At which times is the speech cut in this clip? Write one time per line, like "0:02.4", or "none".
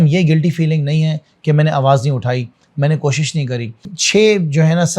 0:04.0